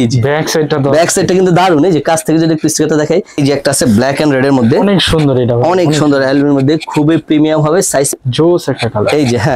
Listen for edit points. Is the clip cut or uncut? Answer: cut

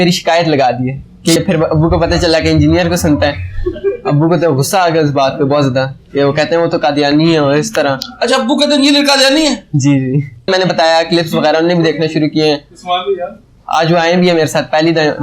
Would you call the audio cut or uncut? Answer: cut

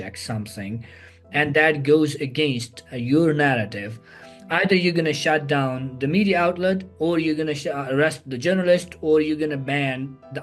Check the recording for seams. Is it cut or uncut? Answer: uncut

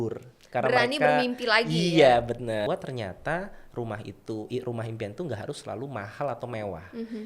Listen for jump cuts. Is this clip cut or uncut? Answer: cut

